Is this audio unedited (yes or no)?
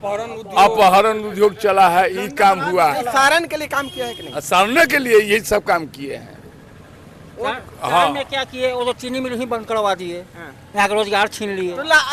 yes